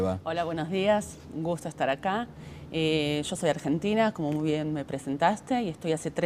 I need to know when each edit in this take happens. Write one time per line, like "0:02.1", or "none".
0:05.2